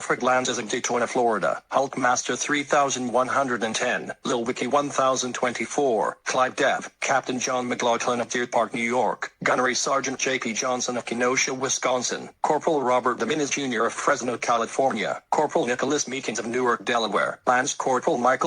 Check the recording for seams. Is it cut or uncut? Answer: cut